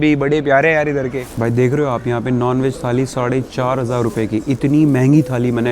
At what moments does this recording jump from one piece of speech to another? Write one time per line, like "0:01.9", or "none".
0:01.3